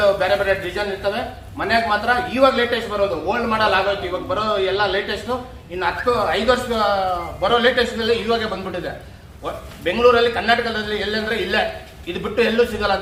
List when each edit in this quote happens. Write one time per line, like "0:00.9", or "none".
none